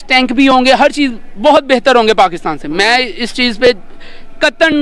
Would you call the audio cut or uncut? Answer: uncut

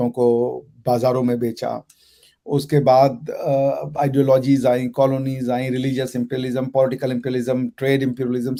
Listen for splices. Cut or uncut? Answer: uncut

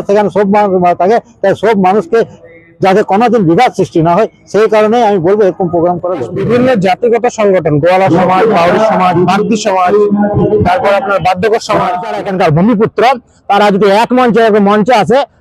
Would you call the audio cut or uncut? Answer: cut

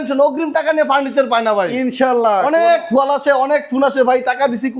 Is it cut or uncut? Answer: uncut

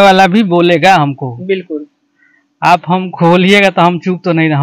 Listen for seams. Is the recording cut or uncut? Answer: uncut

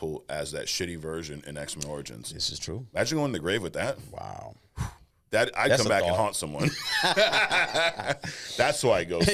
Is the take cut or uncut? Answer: uncut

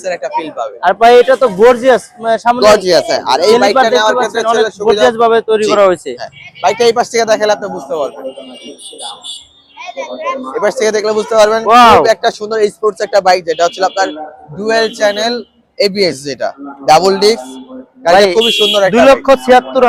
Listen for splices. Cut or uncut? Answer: uncut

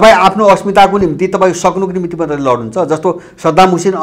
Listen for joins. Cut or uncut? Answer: uncut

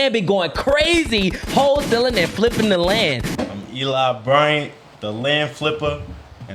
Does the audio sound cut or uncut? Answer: cut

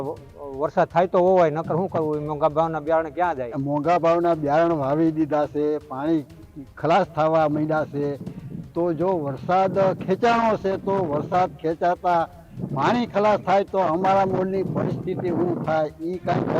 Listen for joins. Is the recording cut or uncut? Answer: cut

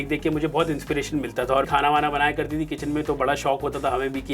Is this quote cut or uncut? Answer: cut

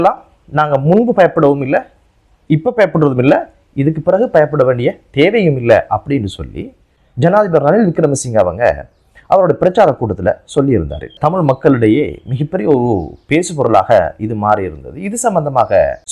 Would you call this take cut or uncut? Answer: uncut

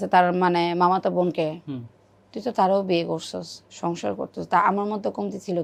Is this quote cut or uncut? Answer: uncut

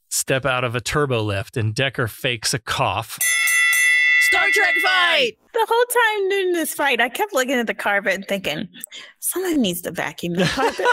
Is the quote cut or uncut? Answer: cut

